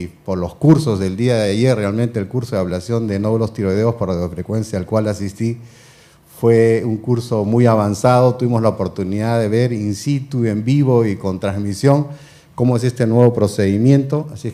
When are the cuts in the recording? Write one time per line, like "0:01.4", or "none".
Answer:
none